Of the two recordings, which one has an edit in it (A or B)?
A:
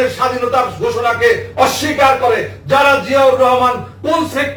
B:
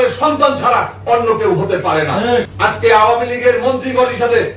B